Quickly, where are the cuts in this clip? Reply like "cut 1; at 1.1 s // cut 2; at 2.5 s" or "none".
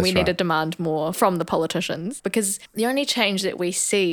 cut 1; at 1.1 s // cut 2; at 2.2 s